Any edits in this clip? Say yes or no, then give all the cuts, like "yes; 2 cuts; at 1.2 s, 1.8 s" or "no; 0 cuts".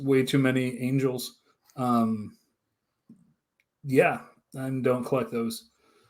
no; 0 cuts